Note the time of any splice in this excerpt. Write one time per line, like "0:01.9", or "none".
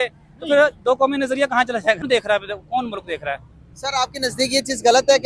0:02.0